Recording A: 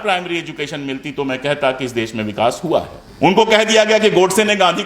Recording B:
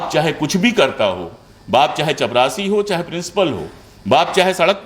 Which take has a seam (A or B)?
A